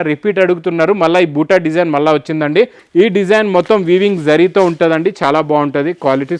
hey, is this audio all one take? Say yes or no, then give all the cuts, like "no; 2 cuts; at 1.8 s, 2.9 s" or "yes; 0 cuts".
no; 1 cut; at 2.8 s